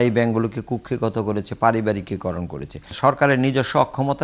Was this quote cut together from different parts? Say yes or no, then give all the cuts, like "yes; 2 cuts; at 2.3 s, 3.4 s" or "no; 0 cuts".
yes; 1 cut; at 2.9 s